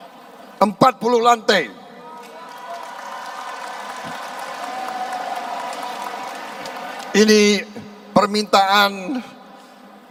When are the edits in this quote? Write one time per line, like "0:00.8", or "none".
none